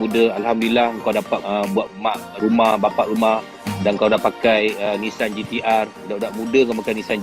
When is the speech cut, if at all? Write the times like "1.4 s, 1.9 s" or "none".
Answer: none